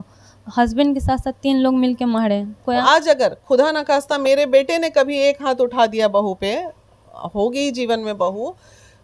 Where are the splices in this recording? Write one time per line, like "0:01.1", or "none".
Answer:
0:02.8